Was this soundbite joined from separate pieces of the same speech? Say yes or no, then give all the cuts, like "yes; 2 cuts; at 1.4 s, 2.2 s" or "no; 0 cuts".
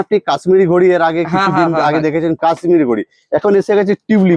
no; 0 cuts